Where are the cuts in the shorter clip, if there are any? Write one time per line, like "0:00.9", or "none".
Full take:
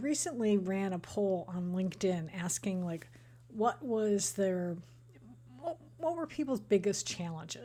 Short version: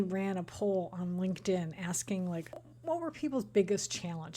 0:02.7